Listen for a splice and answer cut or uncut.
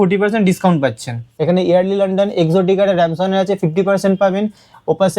cut